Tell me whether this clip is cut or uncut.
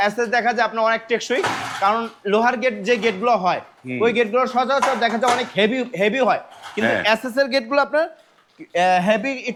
uncut